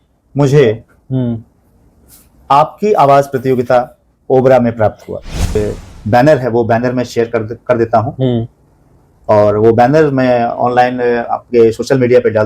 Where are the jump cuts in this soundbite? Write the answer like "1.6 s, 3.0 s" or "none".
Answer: 5.6 s